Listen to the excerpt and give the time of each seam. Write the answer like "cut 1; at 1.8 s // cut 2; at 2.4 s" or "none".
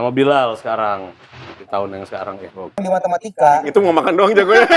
cut 1; at 2.8 s